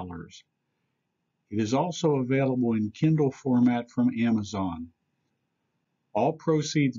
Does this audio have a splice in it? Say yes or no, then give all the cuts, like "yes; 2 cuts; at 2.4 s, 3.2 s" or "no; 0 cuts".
no; 0 cuts